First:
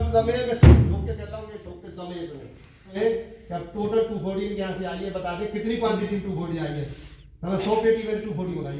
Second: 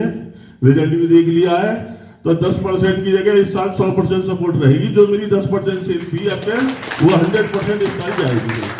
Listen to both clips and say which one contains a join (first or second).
first